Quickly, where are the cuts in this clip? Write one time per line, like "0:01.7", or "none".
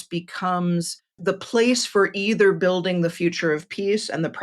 0:01.0